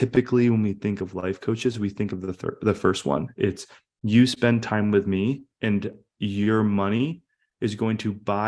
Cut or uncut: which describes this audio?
uncut